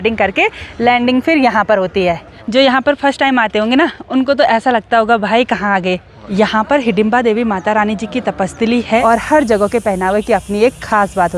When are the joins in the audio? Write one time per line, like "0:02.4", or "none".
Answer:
0:02.3
0:06.3
0:09.0